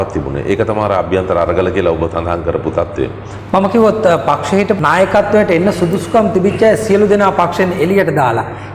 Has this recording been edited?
yes; 2 cuts; at 3.3 s, 4.8 s

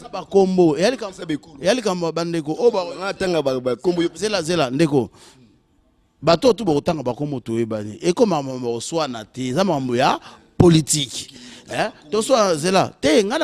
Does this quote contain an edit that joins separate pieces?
no; 0 cuts

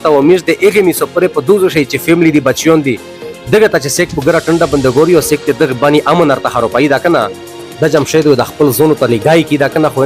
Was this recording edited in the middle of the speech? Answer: no; 0 cuts

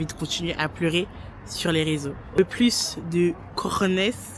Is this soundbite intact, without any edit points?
no; 1 cut; at 2.4 s

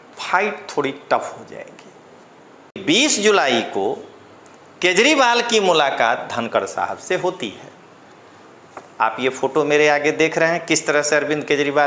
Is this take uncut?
no; 1 cut; at 2.8 s

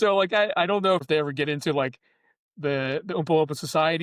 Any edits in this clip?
yes; 1 cut; at 1.1 s

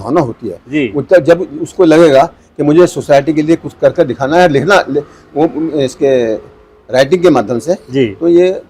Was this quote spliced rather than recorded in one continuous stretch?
no; 0 cuts

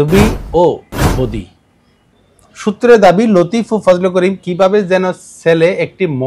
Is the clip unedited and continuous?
no; 1 cut; at 2.0 s

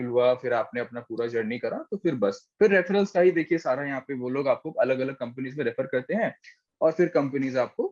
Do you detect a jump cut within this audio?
no; 0 cuts

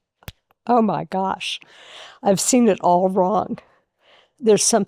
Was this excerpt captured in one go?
yes; 0 cuts

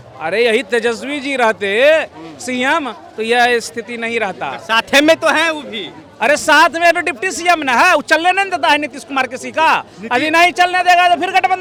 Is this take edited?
no; 0 cuts

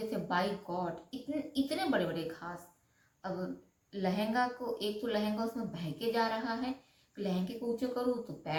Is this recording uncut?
yes; 0 cuts

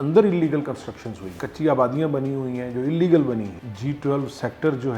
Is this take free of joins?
no; 1 cut; at 3.6 s

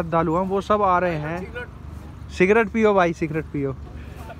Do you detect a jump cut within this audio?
no; 0 cuts

